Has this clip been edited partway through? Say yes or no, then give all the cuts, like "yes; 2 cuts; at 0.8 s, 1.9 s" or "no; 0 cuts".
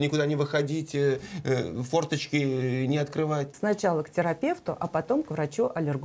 yes; 1 cut; at 3.5 s